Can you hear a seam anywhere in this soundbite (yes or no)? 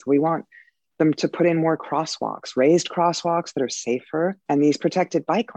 yes